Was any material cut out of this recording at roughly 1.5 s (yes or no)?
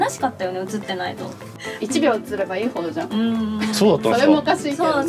yes